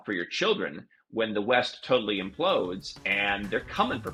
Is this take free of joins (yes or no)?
yes